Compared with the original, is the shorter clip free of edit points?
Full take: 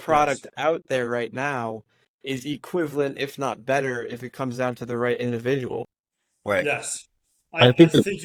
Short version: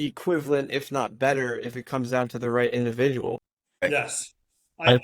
no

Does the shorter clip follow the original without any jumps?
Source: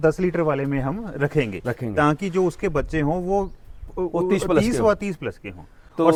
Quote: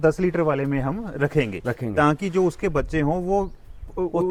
yes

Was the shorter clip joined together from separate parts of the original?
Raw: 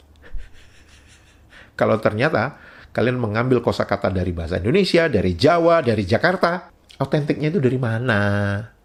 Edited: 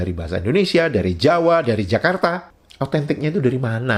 no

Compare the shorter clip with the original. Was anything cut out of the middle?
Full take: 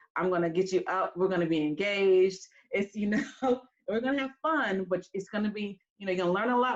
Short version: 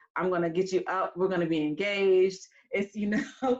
no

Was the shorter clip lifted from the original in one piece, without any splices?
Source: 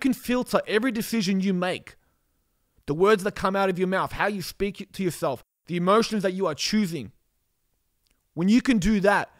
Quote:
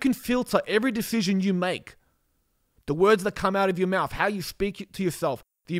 yes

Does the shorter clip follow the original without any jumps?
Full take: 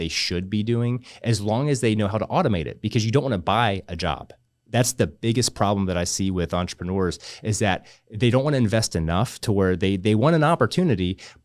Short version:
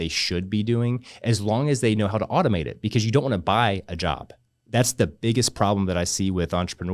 yes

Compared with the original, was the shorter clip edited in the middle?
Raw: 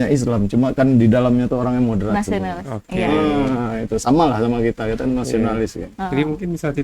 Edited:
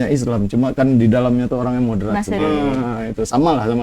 yes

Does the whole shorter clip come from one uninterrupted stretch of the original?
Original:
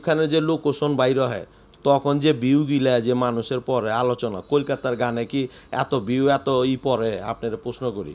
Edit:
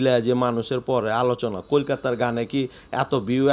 yes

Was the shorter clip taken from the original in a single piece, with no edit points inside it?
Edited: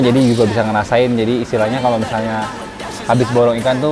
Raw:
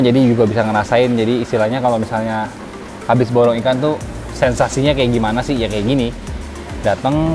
yes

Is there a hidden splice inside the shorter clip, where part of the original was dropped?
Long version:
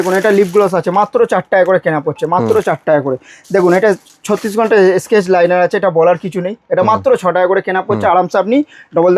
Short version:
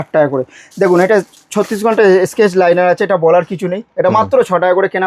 no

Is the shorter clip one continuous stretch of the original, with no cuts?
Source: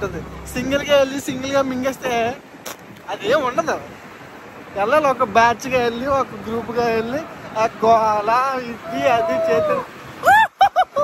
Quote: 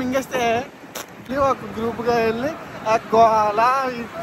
no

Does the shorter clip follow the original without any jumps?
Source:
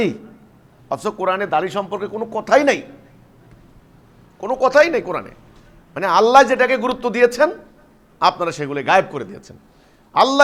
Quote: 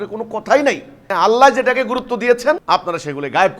no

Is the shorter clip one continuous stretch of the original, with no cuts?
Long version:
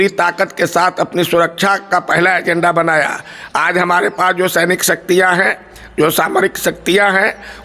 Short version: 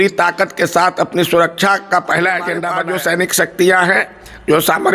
no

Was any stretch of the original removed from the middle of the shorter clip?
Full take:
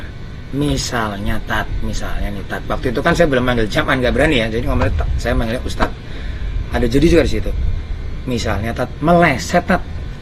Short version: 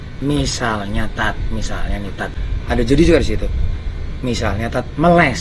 yes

